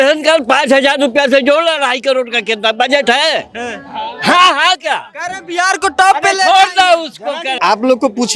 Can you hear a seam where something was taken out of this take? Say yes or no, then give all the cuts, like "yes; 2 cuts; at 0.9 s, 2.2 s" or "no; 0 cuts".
no; 0 cuts